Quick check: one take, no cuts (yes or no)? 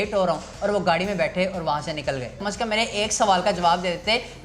no